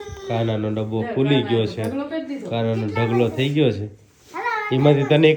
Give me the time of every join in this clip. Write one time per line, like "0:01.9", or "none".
none